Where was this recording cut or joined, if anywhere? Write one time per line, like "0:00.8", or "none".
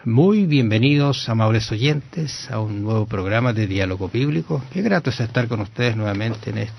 none